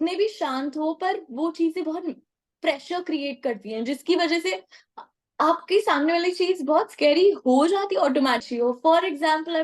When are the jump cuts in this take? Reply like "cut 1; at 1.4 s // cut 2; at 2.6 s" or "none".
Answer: cut 1; at 8.4 s